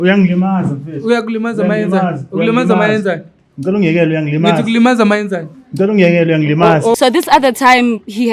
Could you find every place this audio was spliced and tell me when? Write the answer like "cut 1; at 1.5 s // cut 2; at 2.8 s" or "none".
cut 1; at 7.0 s